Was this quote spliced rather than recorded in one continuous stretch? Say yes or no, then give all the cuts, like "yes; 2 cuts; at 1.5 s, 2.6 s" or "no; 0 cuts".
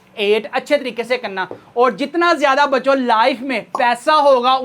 yes; 1 cut; at 1.6 s